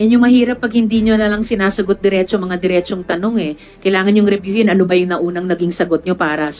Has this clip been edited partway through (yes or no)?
no